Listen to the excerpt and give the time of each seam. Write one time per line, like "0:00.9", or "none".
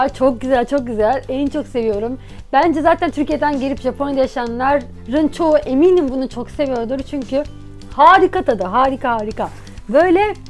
0:03.1